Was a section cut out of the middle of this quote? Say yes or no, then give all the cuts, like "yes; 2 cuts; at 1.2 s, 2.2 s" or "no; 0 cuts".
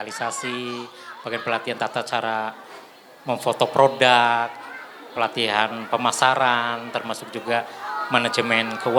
no; 0 cuts